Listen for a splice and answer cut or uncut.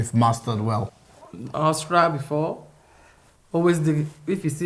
cut